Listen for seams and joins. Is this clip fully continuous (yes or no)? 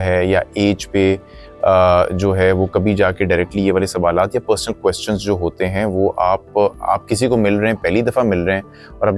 yes